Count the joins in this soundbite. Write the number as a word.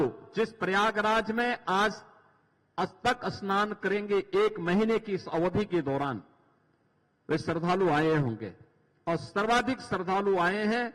zero